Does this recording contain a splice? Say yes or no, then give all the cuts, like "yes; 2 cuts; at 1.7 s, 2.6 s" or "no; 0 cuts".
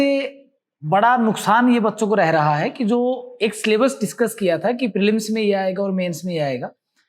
no; 0 cuts